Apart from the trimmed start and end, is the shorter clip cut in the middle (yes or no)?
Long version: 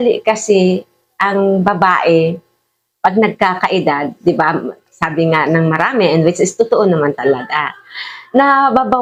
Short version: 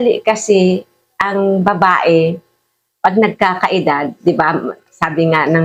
no